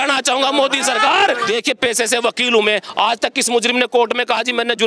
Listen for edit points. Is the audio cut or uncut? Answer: cut